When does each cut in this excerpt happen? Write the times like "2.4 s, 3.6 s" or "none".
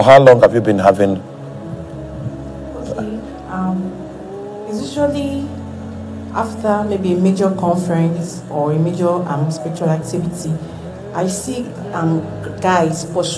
none

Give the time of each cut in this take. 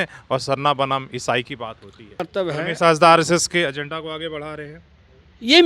2.2 s

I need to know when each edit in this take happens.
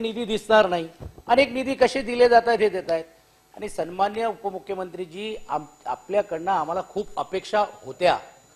none

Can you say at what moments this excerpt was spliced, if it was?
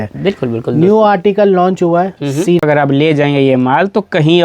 2.6 s

